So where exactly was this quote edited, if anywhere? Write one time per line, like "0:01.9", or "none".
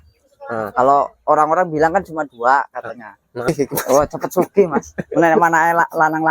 0:03.4